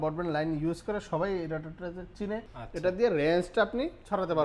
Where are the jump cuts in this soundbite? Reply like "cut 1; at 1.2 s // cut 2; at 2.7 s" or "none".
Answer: cut 1; at 2.6 s